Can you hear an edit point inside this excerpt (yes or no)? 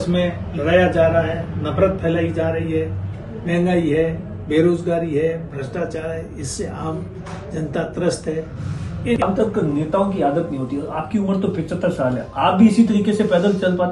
yes